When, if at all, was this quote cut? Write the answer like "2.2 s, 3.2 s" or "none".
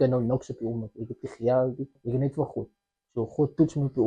2.0 s